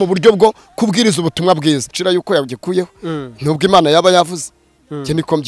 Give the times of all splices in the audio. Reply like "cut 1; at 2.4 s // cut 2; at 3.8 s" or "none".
cut 1; at 1.9 s